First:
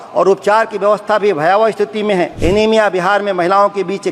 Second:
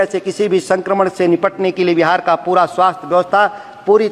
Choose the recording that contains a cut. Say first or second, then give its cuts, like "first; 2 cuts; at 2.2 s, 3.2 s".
first; 1 cut; at 2.3 s